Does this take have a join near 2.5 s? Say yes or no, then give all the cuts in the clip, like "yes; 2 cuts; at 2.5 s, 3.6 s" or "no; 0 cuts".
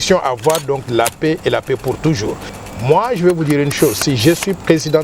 yes; 1 cut; at 2.5 s